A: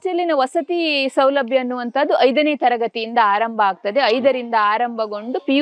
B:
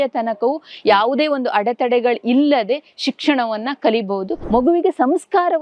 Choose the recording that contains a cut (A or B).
B